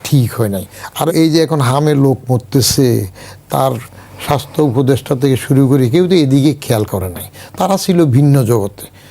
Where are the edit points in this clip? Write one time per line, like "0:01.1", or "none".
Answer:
0:01.1